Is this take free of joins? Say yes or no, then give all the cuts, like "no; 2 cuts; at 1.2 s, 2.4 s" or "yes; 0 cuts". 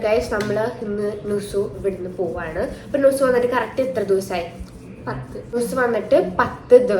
no; 1 cut; at 5.6 s